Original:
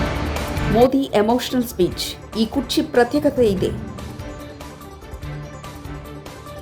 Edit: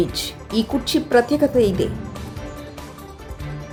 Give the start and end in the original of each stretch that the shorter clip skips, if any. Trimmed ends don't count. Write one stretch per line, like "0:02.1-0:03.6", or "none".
none

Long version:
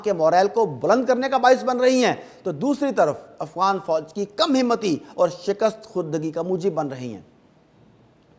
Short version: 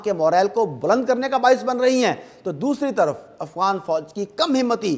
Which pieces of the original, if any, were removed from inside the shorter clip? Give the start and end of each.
none

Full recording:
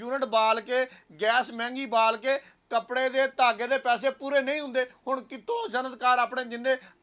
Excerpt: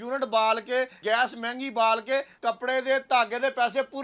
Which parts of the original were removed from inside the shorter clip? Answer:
0:01.0-0:01.1
0:02.5-0:02.6

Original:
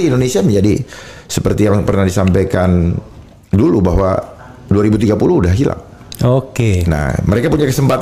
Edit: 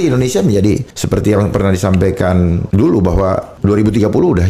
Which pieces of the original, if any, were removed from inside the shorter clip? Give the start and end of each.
0:00.9-0:01.3
0:03.0-0:03.4
0:04.3-0:04.6

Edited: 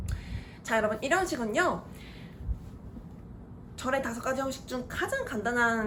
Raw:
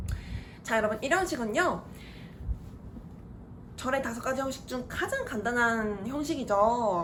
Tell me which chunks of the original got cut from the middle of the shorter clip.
none

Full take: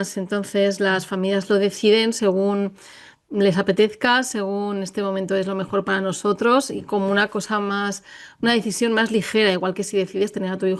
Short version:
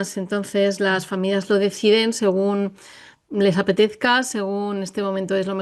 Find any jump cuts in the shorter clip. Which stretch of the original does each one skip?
none

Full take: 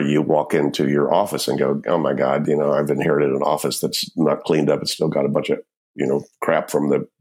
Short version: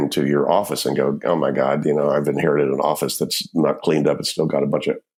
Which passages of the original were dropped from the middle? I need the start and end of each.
none

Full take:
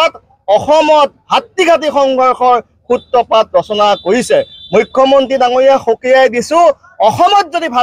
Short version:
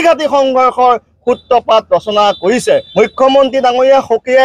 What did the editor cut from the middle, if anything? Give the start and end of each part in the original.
0:04.5-0:04.6

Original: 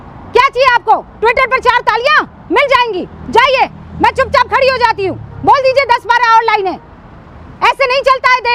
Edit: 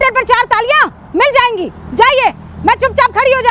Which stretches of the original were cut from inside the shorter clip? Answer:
none

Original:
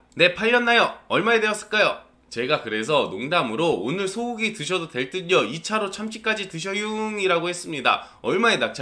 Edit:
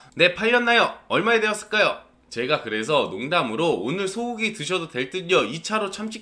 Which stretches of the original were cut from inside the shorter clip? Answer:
none

